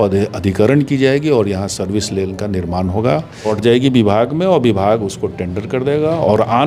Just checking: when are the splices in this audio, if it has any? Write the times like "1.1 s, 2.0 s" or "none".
3.5 s